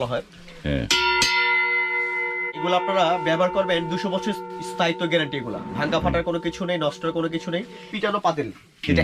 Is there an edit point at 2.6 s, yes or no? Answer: yes